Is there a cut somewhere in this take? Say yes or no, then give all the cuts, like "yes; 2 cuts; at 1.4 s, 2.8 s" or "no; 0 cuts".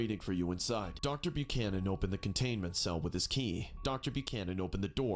yes; 2 cuts; at 0.9 s, 3.7 s